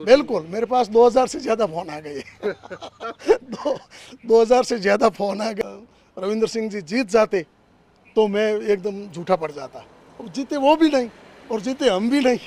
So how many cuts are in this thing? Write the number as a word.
one